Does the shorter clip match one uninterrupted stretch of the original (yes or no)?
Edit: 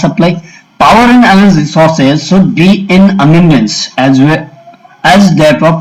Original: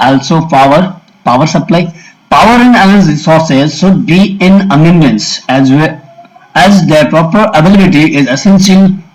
yes